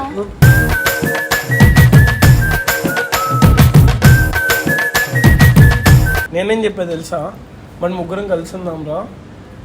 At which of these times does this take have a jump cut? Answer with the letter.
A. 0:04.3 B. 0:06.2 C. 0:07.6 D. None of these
B